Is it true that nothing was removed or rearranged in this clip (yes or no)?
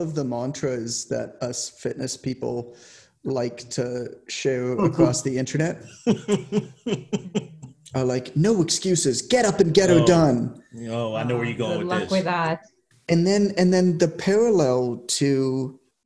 yes